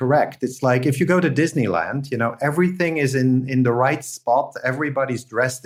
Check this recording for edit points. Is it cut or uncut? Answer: uncut